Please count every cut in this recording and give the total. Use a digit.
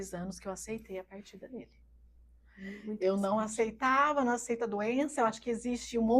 0